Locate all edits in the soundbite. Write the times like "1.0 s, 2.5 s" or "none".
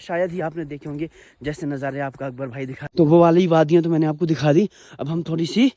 2.8 s